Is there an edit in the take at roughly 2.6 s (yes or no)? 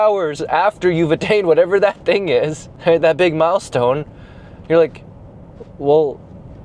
yes